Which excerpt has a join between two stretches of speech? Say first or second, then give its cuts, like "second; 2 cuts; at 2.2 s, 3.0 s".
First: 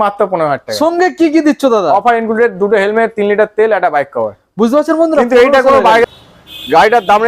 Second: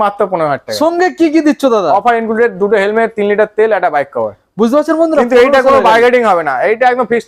first; 1 cut; at 6.0 s